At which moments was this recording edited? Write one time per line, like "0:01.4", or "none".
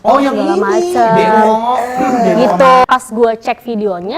0:02.8